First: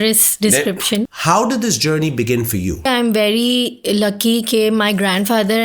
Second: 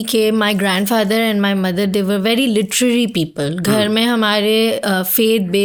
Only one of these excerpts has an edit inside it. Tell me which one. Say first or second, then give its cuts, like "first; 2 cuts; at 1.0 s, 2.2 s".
first; 2 cuts; at 1.1 s, 2.9 s